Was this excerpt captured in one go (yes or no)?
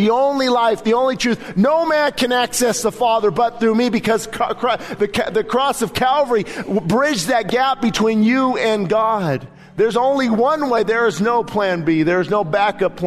yes